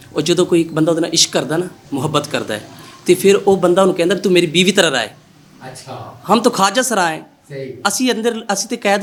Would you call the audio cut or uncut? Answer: uncut